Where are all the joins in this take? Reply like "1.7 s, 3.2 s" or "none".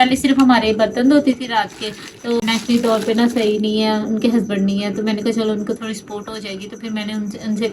2.4 s